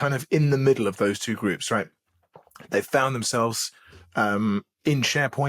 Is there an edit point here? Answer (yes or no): no